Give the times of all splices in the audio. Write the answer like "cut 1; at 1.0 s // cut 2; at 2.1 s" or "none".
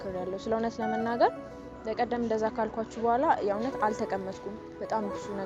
none